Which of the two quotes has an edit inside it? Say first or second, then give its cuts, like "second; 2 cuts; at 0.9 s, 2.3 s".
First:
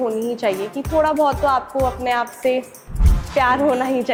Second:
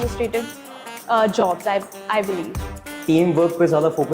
second; 1 cut; at 2.6 s